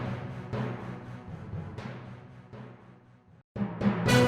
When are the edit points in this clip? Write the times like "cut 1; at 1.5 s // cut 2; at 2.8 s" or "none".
cut 1; at 3.3 s